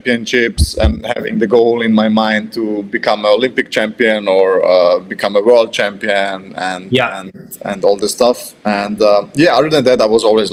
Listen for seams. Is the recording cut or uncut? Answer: uncut